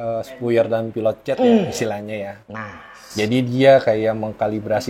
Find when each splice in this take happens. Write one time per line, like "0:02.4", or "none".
none